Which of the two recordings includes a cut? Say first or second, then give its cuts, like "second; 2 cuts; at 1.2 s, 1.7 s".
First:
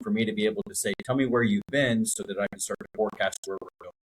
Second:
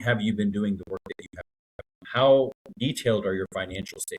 second; 2 cuts; at 2.0 s, 2.6 s